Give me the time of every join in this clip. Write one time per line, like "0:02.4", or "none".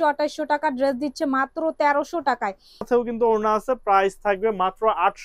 0:02.9

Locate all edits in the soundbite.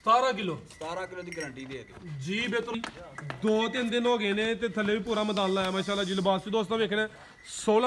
0:02.7

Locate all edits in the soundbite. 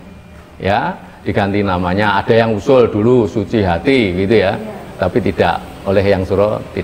none

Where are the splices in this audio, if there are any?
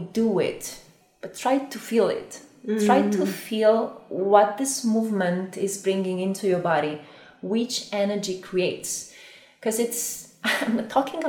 none

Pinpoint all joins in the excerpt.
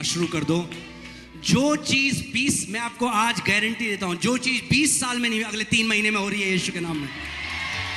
none

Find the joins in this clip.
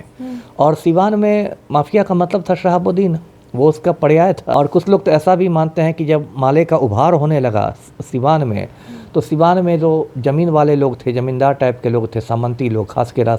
0:04.5

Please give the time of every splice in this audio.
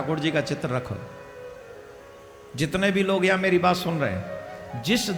none

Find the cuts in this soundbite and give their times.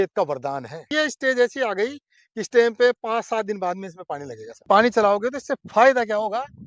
0:00.9
0:04.6

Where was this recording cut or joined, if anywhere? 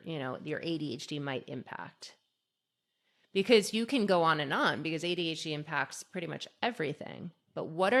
none

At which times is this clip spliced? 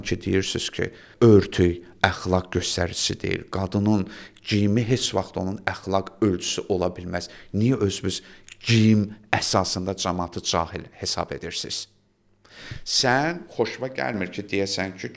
none

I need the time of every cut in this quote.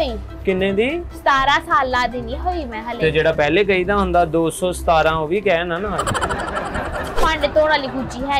0:07.2

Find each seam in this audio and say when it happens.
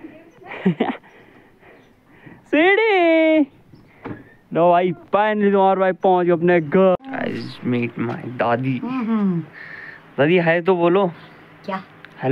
0:07.0

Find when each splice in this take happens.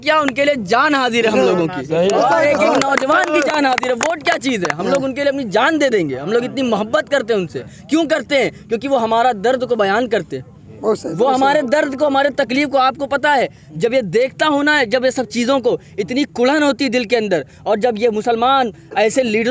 none

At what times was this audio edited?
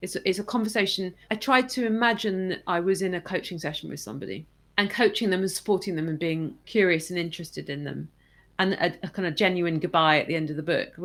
none

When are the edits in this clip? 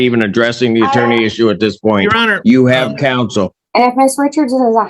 0:03.6

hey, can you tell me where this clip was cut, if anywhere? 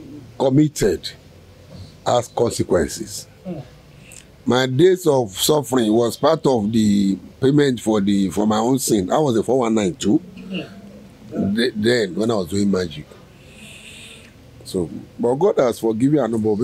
none

